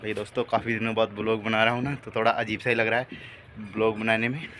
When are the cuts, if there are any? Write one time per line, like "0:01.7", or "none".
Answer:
none